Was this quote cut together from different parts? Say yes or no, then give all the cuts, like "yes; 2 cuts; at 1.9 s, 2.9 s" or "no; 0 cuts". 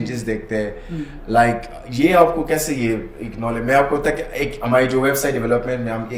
no; 0 cuts